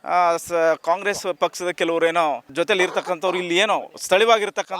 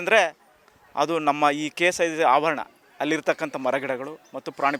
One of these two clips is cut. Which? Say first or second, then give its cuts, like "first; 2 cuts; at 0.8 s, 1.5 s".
first; 1 cut; at 2.5 s